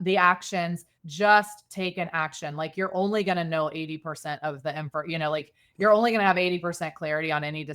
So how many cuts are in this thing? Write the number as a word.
one